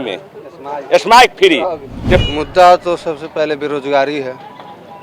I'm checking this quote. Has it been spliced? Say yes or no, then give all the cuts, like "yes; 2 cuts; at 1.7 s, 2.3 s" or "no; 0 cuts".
yes; 1 cut; at 2.2 s